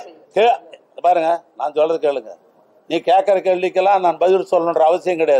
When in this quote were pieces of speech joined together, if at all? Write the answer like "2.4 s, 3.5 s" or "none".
none

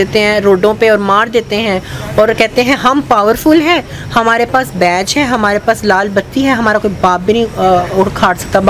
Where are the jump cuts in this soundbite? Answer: none

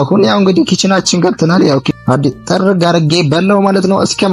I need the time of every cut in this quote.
2.0 s

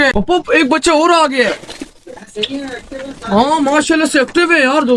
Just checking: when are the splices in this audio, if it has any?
none

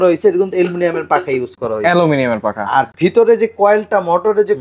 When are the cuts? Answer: none

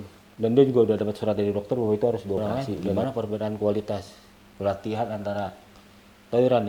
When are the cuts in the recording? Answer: 2.9 s

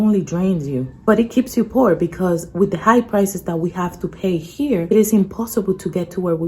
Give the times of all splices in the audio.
0.9 s, 4.9 s

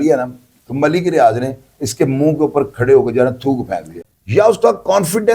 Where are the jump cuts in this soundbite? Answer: 4.0 s

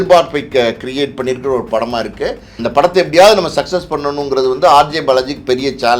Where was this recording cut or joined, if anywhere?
2.5 s

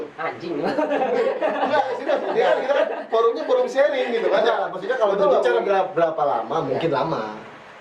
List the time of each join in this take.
none

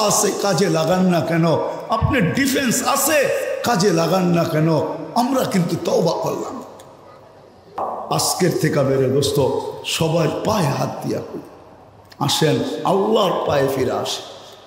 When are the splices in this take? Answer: 7.9 s

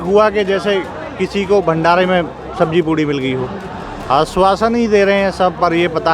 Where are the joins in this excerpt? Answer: 3.9 s

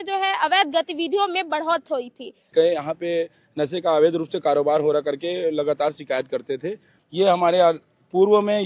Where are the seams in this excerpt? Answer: 2.5 s, 6.9 s

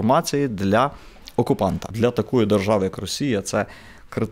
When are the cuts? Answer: 1.9 s

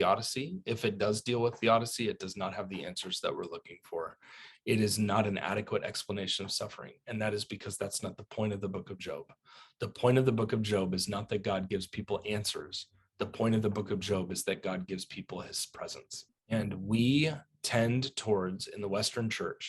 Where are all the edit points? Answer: 16.3 s

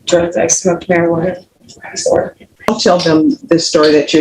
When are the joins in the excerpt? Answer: 2.8 s

